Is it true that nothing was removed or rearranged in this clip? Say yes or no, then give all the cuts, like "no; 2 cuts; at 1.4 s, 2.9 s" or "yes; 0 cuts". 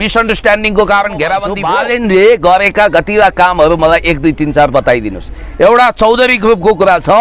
no; 1 cut; at 1.5 s